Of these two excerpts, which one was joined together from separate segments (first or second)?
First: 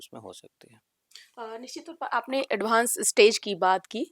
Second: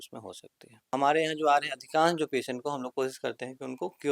second